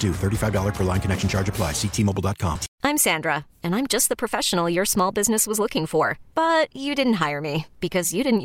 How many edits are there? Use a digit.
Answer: 1